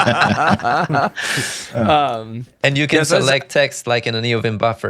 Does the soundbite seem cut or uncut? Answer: uncut